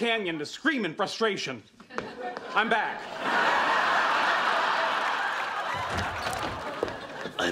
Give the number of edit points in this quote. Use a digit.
1